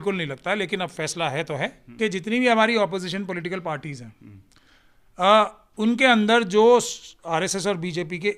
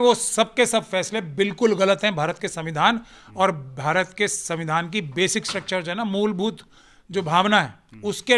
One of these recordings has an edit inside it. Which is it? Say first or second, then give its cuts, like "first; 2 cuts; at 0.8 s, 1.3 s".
first; 1 cut; at 1.8 s